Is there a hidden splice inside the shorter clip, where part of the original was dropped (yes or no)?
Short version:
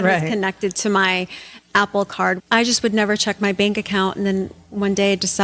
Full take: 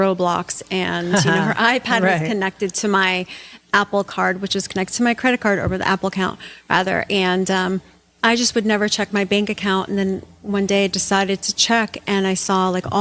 yes